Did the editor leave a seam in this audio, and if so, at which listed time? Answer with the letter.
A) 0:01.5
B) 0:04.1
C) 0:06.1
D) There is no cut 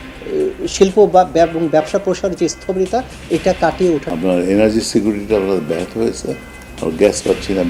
B